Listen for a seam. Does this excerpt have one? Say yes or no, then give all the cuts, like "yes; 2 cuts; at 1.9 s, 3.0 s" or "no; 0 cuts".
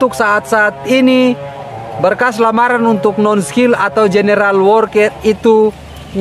no; 0 cuts